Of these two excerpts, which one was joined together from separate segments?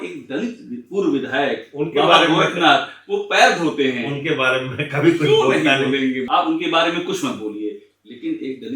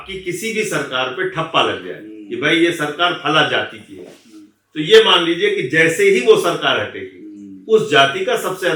first; 1 cut; at 6.2 s

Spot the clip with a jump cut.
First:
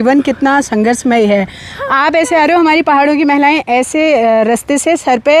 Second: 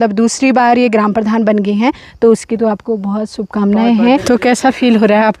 second; 1 cut; at 4.2 s

